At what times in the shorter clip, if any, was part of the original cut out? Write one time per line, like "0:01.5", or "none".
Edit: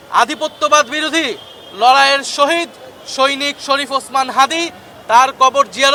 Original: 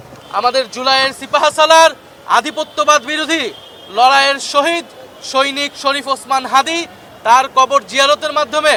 none